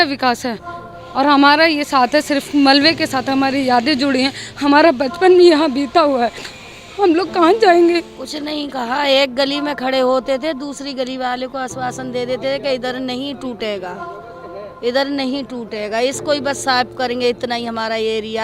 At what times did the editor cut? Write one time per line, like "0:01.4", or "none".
0:08.2